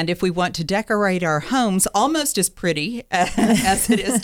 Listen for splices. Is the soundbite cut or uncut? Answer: uncut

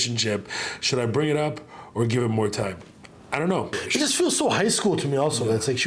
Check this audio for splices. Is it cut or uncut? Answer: cut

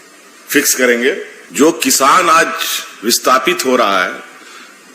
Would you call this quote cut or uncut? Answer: cut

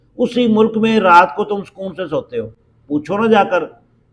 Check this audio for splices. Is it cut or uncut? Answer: uncut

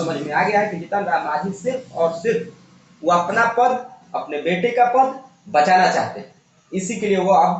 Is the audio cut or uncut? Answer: uncut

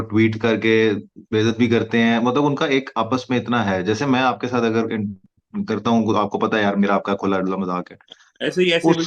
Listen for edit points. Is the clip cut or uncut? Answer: uncut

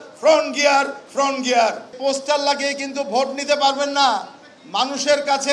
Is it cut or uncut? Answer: cut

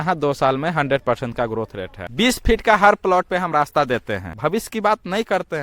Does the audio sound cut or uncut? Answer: cut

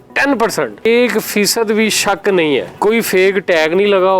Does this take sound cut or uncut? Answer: cut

